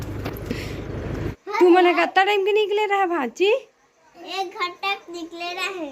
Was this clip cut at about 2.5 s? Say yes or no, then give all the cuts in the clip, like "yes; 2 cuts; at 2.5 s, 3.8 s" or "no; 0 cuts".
no; 1 cut; at 1.3 s